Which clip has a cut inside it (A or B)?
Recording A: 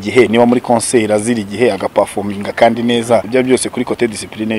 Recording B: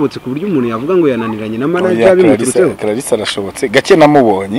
A